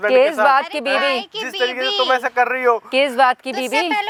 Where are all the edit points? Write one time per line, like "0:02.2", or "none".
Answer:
none